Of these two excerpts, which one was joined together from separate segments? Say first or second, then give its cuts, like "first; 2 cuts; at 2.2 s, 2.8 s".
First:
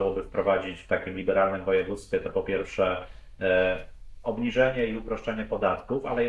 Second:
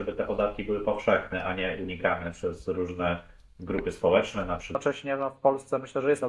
second; 1 cut; at 4.8 s